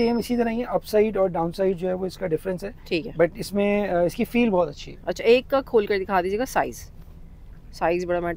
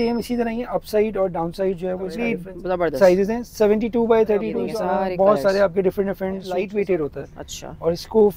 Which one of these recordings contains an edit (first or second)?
second